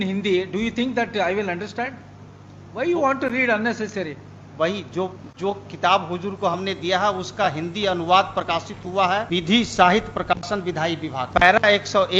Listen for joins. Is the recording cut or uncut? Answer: uncut